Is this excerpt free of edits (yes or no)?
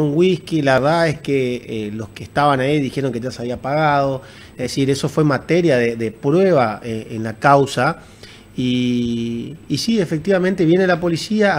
yes